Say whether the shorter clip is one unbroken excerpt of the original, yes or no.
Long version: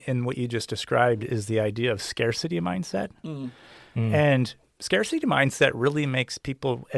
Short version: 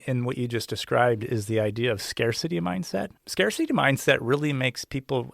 no